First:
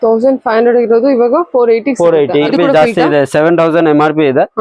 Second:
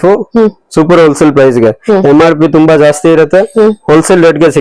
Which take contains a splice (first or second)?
first